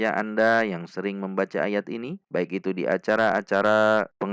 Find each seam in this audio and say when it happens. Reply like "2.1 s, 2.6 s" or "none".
none